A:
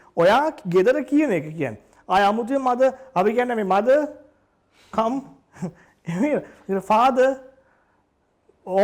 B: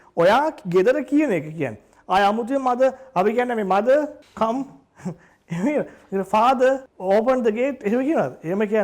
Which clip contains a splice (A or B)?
B